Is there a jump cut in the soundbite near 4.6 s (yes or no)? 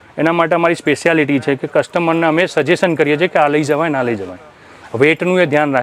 no